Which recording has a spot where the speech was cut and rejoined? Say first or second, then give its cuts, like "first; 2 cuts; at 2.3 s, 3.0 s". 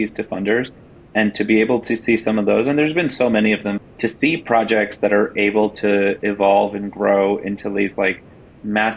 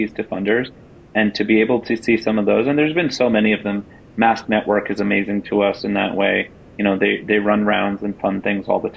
first; 1 cut; at 3.9 s